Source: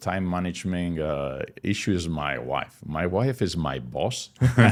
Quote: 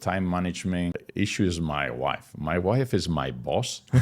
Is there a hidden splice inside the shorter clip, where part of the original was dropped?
yes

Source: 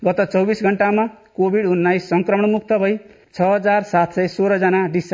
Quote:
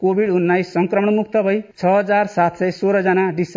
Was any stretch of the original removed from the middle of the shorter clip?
yes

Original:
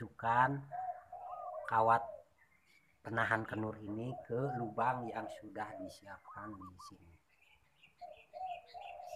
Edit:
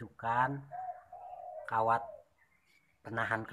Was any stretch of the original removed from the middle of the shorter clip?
no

